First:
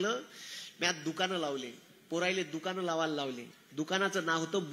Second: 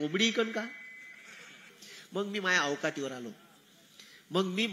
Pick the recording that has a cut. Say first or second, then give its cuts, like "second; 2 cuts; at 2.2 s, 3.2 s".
second; 1 cut; at 1.6 s